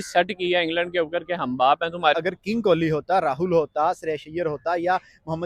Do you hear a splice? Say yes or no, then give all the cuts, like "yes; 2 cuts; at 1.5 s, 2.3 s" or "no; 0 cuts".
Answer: yes; 1 cut; at 2.1 s